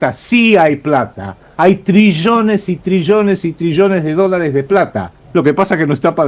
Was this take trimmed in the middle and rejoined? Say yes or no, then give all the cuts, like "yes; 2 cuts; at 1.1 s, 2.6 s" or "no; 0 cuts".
no; 0 cuts